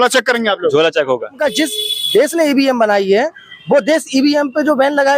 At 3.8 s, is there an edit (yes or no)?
no